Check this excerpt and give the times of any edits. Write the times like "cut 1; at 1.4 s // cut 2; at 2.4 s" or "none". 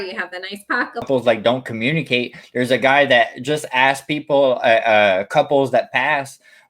cut 1; at 1.0 s